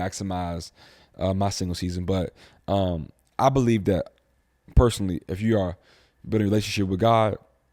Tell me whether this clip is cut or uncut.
uncut